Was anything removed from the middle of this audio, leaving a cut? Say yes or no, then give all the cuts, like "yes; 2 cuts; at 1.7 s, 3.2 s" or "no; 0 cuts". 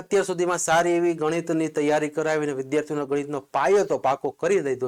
no; 0 cuts